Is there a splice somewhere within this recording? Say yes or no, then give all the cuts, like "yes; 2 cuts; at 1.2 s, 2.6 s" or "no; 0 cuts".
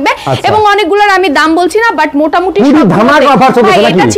no; 0 cuts